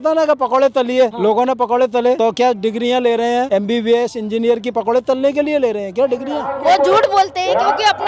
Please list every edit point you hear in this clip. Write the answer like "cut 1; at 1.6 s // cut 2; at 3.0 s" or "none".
cut 1; at 1.1 s // cut 2; at 2.2 s // cut 3; at 3.5 s // cut 4; at 6.5 s